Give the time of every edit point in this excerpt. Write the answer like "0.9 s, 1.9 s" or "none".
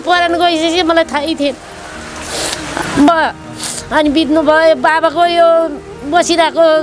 3.1 s